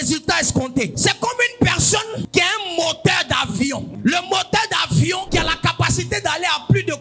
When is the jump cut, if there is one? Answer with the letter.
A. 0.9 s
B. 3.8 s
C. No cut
A